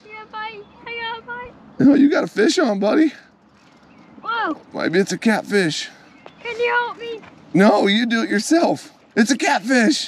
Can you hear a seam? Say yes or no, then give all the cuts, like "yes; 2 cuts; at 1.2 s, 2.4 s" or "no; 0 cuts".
no; 0 cuts